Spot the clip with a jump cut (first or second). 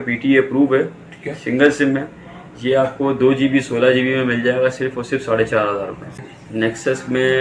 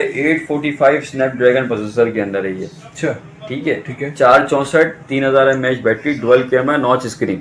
first